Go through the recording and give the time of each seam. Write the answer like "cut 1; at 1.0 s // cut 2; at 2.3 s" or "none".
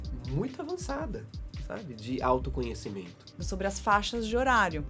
cut 1; at 3.4 s